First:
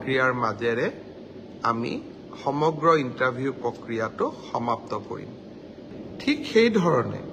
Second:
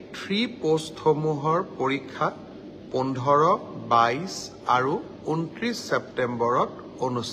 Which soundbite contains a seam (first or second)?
first